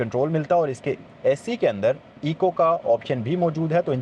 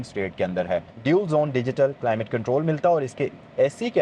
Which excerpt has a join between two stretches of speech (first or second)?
second